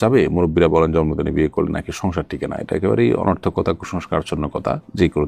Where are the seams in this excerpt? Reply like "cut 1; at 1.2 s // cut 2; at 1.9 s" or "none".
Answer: none

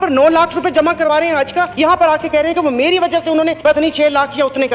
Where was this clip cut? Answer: cut 1; at 1.7 s // cut 2; at 3.6 s

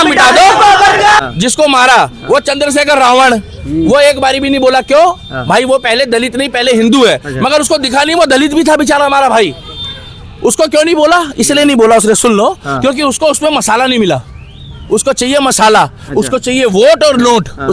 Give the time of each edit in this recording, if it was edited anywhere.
cut 1; at 1.2 s

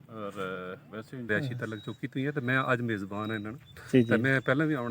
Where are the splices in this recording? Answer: cut 1; at 1.3 s

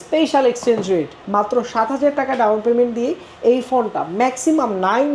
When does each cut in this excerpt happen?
cut 1; at 1.2 s

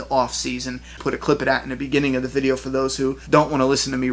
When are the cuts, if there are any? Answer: cut 1; at 0.9 s // cut 2; at 3.2 s

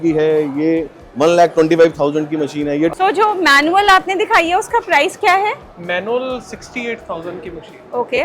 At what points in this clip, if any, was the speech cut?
cut 1; at 2.9 s

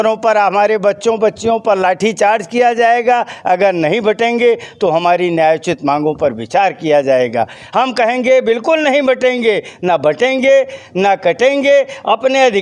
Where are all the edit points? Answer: none

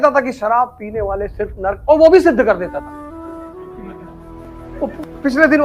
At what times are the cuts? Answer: cut 1; at 4.4 s

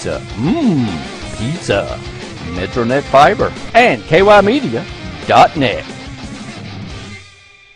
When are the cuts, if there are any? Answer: cut 1; at 3.6 s

